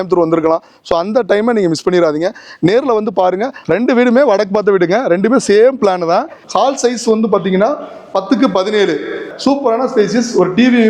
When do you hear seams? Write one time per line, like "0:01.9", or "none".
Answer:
0:03.5
0:06.4
0:09.3